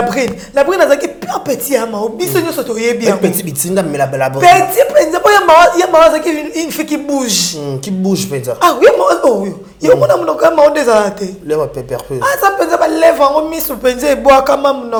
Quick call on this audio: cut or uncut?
uncut